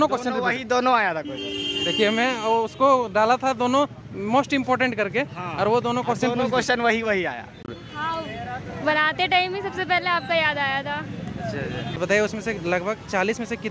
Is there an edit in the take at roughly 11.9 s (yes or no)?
yes